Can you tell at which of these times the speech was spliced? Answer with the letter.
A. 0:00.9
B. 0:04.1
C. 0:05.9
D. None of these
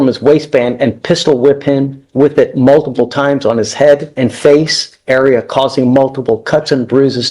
B